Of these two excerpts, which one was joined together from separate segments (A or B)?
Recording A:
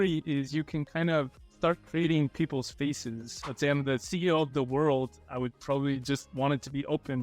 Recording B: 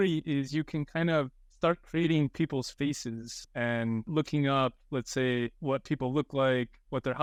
A